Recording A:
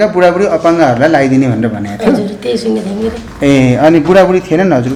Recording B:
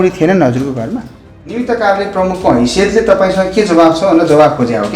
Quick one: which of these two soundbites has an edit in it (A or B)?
B